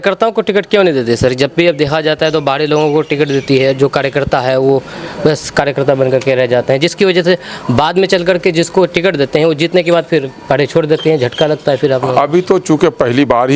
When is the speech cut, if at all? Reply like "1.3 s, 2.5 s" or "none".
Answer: none